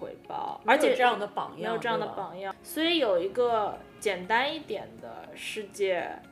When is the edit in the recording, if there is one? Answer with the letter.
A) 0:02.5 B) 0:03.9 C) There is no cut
A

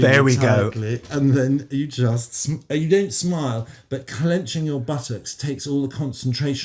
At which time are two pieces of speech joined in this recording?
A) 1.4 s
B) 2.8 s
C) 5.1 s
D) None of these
D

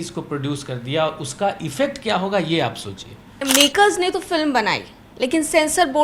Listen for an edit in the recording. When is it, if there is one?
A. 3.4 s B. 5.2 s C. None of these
A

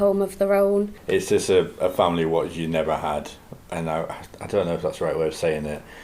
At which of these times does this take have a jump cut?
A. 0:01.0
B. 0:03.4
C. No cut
A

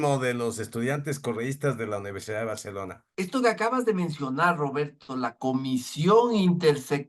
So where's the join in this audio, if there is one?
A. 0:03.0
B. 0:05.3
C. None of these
A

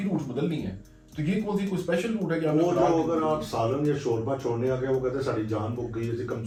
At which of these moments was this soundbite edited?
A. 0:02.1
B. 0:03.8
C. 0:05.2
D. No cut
D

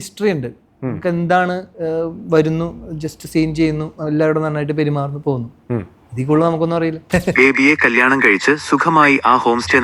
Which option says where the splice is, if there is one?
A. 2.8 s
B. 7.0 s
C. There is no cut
B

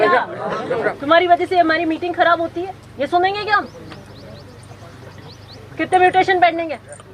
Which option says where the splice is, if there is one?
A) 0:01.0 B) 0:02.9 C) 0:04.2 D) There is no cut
A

